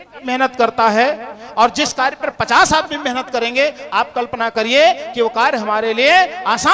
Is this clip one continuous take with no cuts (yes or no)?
yes